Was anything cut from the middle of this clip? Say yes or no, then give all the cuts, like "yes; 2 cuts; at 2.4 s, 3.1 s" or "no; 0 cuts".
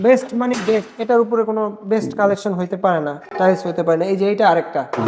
no; 0 cuts